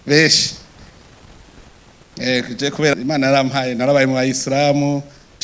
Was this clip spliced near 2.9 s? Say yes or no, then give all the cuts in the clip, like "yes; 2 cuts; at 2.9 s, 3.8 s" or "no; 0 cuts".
yes; 1 cut; at 2.9 s